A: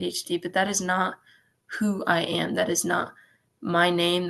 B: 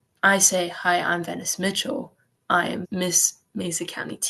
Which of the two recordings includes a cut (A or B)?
B